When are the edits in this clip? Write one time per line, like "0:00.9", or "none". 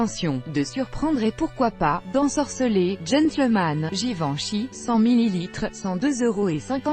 0:02.5